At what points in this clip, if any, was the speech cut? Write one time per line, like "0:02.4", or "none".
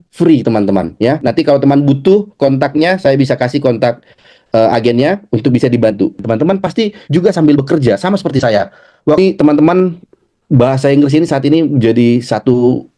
0:01.2
0:06.2
0:09.2